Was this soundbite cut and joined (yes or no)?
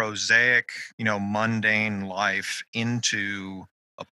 no